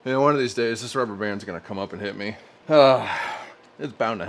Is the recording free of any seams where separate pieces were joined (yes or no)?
no